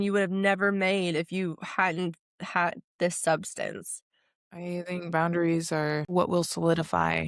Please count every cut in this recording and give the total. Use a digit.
2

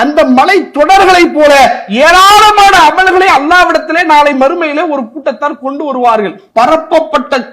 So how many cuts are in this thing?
1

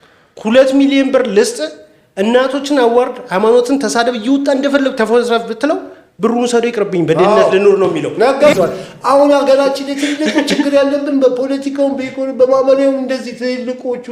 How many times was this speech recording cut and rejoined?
1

